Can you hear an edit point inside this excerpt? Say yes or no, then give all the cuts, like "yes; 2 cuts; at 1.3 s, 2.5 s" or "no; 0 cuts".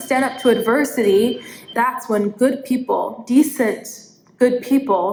no; 0 cuts